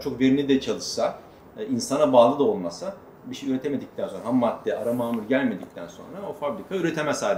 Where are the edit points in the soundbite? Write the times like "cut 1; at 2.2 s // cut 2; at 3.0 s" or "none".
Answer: none